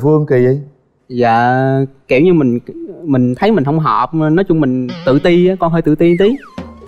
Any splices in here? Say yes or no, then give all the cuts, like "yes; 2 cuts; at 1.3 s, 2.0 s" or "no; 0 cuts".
no; 0 cuts